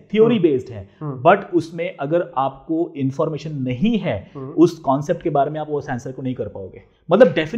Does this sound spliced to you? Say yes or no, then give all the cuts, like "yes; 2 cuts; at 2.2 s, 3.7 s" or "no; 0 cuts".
no; 0 cuts